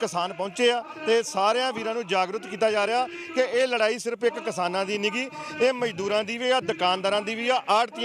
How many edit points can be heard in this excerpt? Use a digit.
0